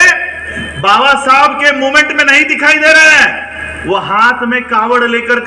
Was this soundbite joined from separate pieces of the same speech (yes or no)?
no